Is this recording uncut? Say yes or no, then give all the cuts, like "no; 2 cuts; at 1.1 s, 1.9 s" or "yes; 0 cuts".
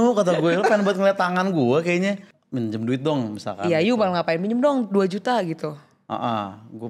no; 1 cut; at 2.3 s